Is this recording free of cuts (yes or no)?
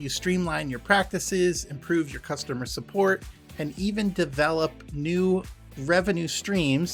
yes